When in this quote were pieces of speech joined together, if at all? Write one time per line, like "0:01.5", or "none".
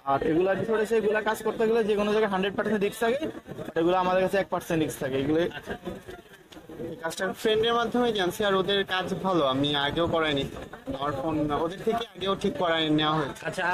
0:07.3